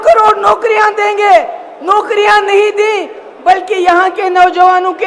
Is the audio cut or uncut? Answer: uncut